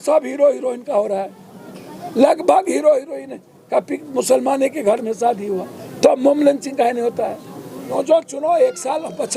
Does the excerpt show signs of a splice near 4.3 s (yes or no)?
no